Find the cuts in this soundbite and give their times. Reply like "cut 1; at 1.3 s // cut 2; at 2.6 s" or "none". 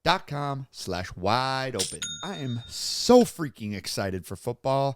cut 1; at 2.2 s